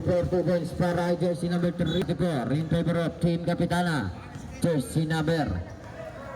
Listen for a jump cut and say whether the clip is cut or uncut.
cut